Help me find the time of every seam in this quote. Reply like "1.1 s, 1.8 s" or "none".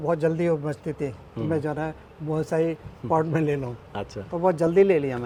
none